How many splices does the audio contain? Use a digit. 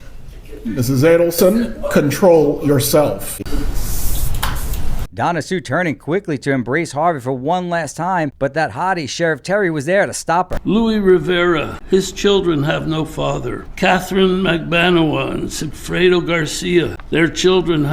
6